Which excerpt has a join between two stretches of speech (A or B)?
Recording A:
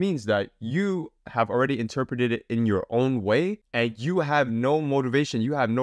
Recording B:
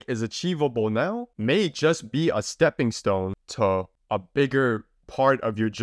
B